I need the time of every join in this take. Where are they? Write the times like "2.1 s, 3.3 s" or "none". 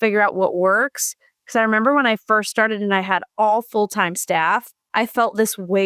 4.8 s